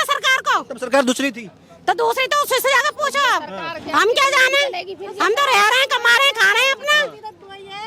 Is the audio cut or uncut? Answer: uncut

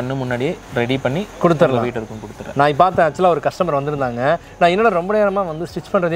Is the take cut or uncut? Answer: uncut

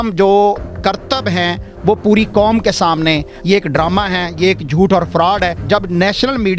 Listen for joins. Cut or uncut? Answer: cut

